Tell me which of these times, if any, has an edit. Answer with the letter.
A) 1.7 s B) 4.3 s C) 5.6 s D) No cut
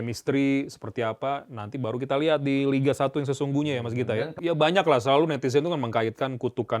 B